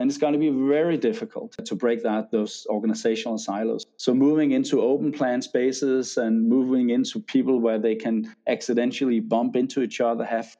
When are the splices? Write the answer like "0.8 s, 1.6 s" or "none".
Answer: 1.7 s, 3.8 s